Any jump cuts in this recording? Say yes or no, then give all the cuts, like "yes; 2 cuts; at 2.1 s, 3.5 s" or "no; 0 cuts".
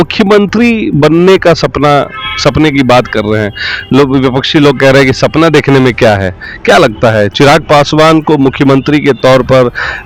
no; 0 cuts